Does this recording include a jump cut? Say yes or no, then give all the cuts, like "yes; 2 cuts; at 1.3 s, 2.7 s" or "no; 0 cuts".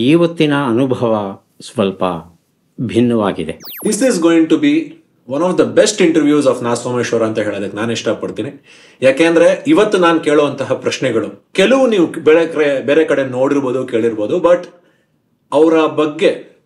yes; 2 cuts; at 3.7 s, 11.4 s